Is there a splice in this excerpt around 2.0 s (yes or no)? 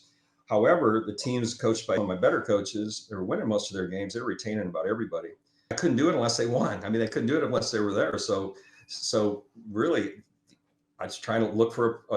yes